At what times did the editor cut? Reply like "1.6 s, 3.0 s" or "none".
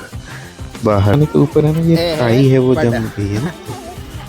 1.1 s